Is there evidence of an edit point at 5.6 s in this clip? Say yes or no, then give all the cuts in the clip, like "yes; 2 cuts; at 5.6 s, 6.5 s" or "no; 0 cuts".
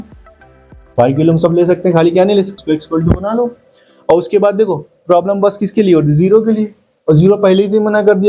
no; 1 cut; at 2.5 s